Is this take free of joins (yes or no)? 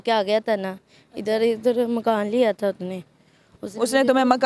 yes